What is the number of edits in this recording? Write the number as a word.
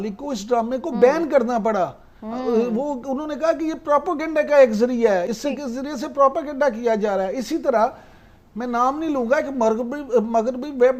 zero